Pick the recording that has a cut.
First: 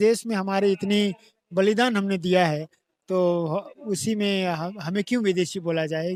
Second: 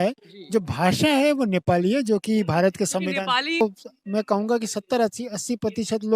second; 1 cut; at 3.6 s

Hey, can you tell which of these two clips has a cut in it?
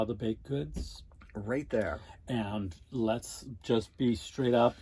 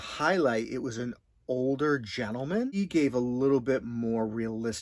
second; 1 cut; at 2.7 s

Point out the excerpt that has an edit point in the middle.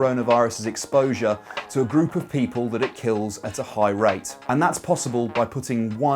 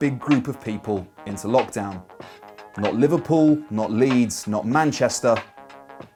first; 1 cut; at 4.3 s

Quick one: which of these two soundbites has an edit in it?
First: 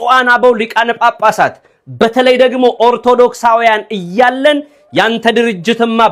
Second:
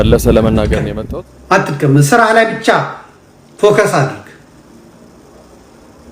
second; 1 cut; at 0.9 s

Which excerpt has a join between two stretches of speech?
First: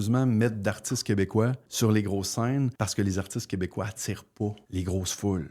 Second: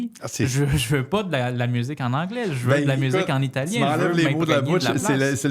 first; 3 cuts; at 1.6 s, 2.7 s, 4.6 s

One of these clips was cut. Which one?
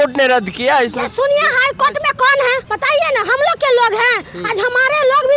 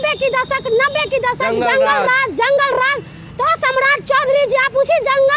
first; 1 cut; at 2.7 s

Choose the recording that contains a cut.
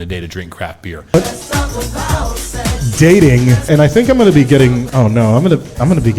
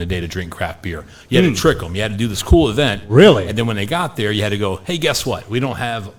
first; 3 cuts; at 1.1 s, 3.7 s, 4.9 s

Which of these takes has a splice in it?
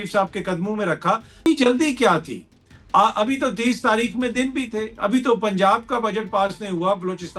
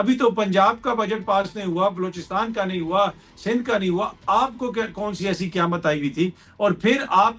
first; 1 cut; at 1.5 s

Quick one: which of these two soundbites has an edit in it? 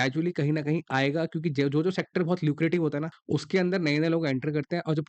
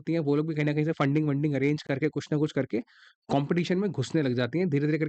first; 1 cut; at 3.1 s

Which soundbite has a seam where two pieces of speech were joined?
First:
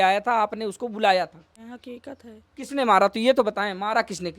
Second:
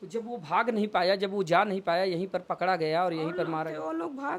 first; 1 cut; at 1.5 s

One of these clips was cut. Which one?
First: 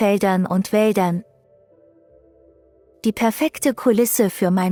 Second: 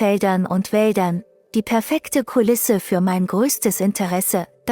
second; 1 cut; at 1.3 s

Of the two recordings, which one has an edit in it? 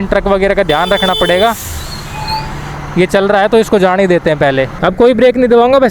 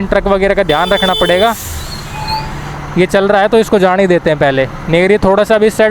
first; 1 cut; at 4.7 s

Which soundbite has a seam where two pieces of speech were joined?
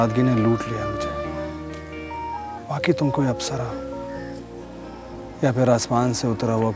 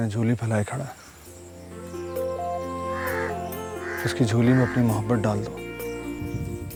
first; 2 cuts; at 2.1 s, 5.3 s

